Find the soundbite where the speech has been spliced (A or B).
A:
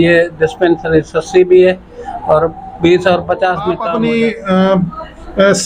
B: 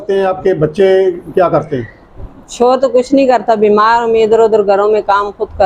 A